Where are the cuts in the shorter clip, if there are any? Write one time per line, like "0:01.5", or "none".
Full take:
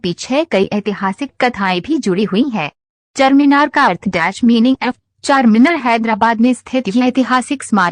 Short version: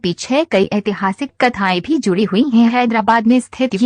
0:02.9